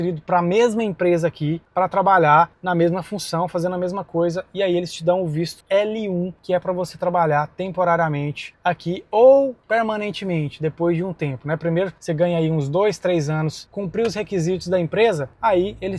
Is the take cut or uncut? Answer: cut